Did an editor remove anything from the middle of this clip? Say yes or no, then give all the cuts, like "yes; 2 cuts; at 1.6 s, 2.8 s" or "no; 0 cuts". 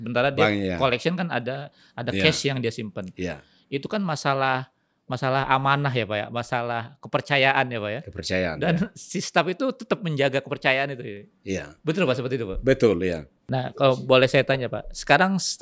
yes; 1 cut; at 13.3 s